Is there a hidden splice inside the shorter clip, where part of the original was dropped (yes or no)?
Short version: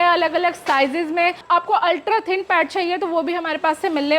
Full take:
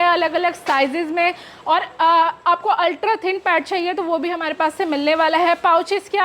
yes